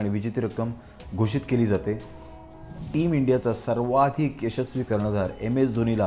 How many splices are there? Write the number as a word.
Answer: one